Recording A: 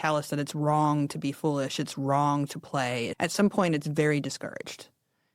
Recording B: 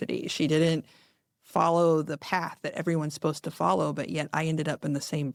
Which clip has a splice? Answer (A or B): A